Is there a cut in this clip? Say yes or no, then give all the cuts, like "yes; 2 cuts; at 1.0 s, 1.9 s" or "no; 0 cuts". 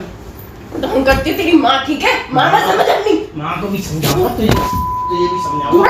no; 0 cuts